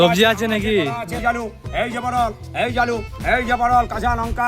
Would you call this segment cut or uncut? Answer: cut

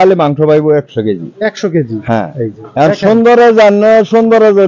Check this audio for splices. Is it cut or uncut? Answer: uncut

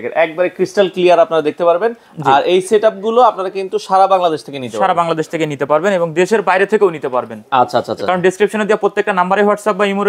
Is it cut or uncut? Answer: uncut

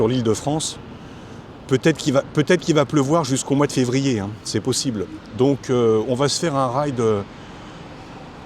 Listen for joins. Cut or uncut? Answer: uncut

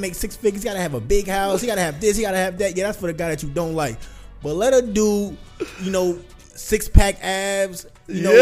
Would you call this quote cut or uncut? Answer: uncut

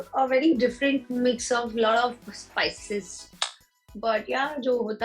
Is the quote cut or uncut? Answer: uncut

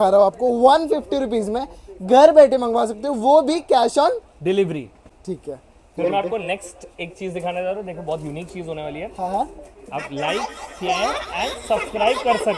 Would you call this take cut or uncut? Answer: uncut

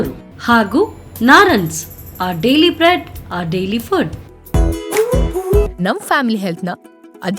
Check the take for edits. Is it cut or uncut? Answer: uncut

